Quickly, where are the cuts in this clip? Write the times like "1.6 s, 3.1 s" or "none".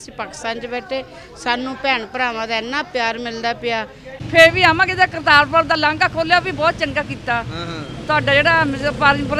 4.2 s